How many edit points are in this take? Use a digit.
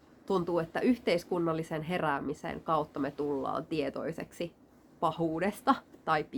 0